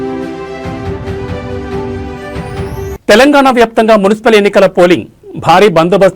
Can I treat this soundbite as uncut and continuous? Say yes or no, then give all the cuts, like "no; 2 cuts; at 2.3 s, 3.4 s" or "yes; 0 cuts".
yes; 0 cuts